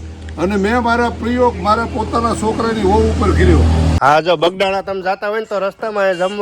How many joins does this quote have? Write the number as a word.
one